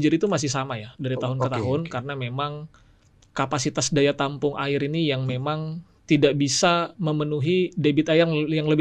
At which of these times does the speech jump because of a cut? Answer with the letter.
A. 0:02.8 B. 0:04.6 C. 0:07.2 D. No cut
D